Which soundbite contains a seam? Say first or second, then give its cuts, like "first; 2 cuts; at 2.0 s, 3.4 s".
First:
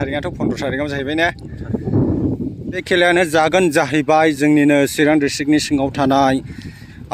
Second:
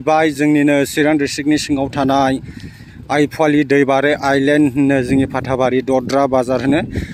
first; 1 cut; at 2.8 s